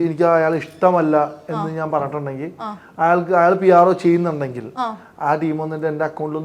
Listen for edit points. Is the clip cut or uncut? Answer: uncut